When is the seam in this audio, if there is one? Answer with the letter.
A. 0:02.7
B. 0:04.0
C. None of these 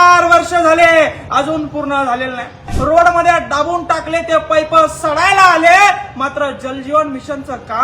A